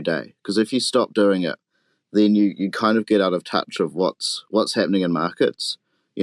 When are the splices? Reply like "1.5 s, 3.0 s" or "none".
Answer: none